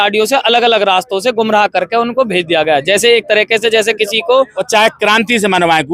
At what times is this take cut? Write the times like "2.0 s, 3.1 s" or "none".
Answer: 4.6 s